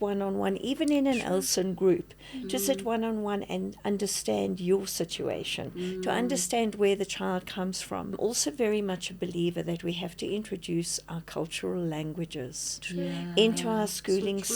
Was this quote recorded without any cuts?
no; 1 cut; at 8.2 s

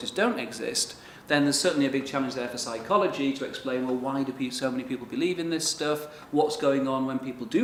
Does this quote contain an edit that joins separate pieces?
no; 0 cuts

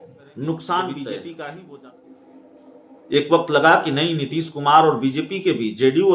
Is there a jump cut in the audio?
yes; 1 cut; at 1.6 s

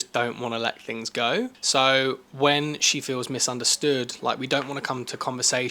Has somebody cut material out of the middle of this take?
yes; 1 cut; at 1.6 s

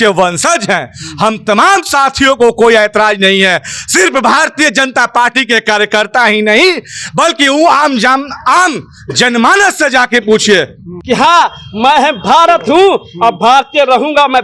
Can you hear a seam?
yes; 1 cut; at 10.9 s

